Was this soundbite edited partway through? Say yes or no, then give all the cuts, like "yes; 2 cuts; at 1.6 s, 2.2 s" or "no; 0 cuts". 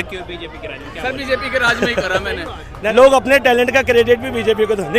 yes; 1 cut; at 2.9 s